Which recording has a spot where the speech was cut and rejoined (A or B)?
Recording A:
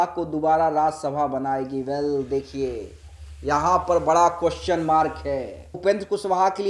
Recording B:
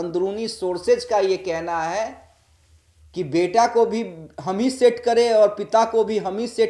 A